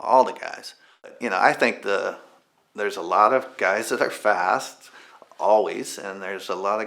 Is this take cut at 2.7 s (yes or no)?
no